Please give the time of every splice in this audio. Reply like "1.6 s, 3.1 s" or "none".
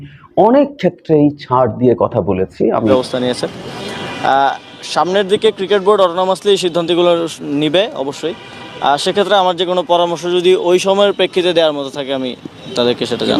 2.9 s